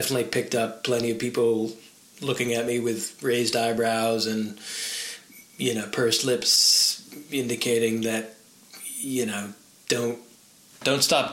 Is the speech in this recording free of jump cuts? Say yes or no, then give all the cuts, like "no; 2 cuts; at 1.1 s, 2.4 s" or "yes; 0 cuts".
yes; 0 cuts